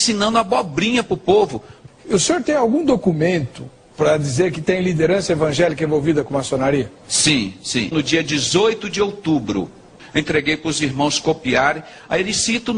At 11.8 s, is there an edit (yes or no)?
no